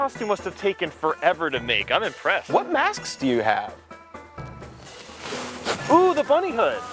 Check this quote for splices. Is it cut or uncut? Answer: cut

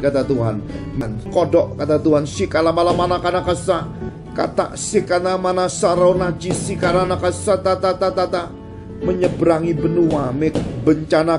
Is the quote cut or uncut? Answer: cut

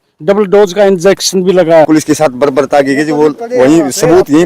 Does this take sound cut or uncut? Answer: cut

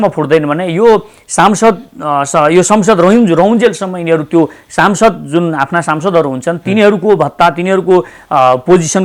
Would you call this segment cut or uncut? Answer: uncut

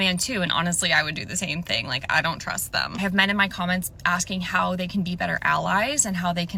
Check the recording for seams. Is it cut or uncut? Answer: uncut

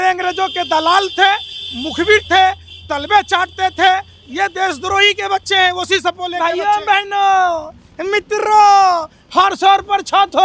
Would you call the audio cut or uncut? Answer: cut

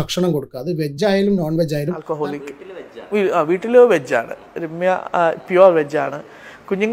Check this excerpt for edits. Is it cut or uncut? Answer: cut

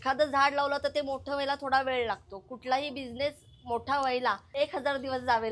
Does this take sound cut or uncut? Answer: cut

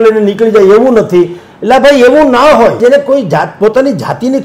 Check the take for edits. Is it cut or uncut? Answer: cut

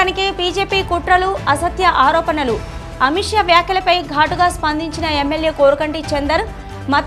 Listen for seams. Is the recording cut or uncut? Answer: uncut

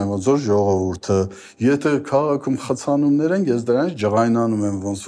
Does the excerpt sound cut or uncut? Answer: uncut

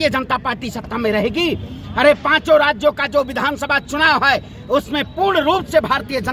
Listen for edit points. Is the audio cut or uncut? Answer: uncut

